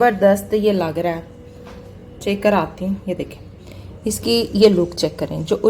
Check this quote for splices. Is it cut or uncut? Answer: uncut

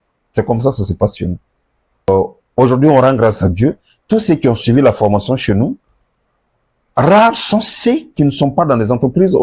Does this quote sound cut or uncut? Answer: cut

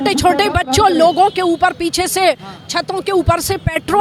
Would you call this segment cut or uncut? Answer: uncut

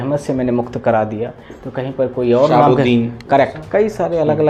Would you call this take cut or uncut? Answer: uncut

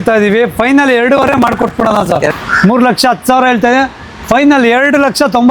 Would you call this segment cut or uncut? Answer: cut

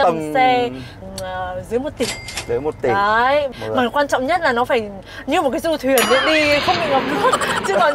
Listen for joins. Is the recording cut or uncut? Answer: cut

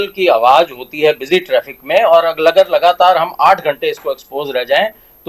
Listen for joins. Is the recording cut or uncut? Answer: uncut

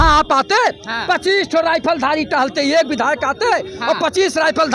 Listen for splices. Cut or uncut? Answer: uncut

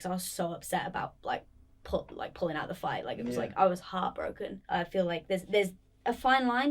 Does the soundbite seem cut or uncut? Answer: cut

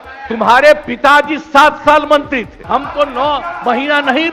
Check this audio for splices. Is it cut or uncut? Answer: cut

